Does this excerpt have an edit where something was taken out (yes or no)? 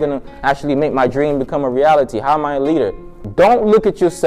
yes